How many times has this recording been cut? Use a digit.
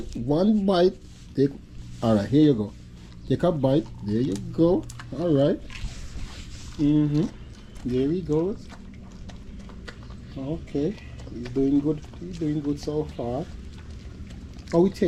0